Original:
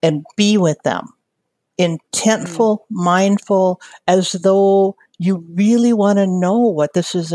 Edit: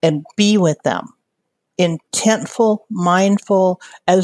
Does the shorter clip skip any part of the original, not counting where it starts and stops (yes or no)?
no